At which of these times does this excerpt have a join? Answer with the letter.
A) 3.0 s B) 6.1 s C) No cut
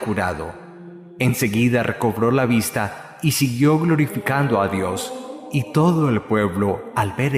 C